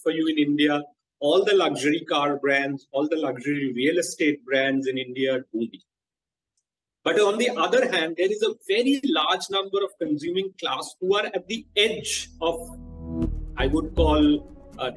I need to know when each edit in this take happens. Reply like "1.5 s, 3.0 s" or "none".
none